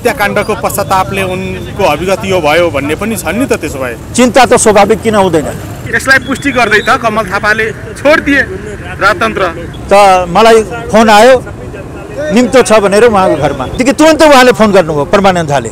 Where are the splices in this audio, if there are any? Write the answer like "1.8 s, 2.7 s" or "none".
5.9 s, 9.7 s, 13.8 s

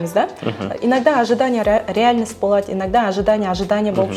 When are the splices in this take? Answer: none

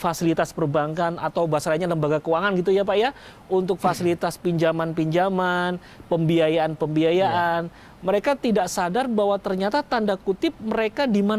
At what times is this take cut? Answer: none

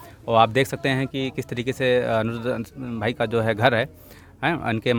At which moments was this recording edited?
none

